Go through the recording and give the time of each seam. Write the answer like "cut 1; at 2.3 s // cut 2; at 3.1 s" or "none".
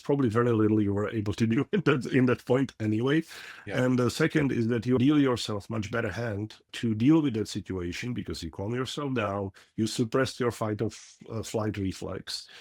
cut 1; at 5.0 s // cut 2; at 6.7 s